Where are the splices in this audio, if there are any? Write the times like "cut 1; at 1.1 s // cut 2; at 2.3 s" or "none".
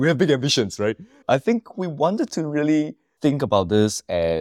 cut 1; at 1.2 s // cut 2; at 3.0 s